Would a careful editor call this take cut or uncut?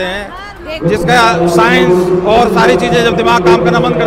uncut